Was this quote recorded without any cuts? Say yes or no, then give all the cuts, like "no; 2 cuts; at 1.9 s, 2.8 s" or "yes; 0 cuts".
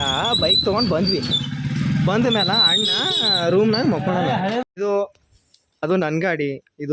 no; 1 cut; at 4.6 s